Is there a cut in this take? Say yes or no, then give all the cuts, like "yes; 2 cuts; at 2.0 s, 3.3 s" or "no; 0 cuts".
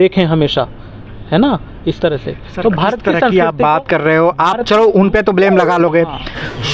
no; 0 cuts